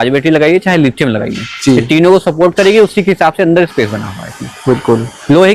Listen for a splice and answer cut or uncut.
uncut